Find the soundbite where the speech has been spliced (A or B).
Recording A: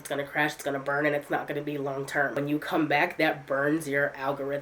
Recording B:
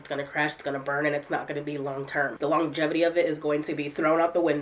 A